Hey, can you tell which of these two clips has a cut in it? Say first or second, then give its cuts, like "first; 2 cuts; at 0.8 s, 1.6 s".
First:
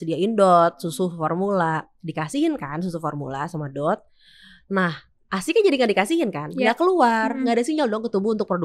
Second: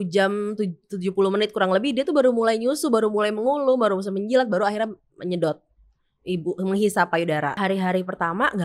second; 1 cut; at 7.6 s